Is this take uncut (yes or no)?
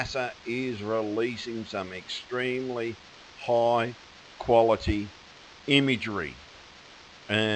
yes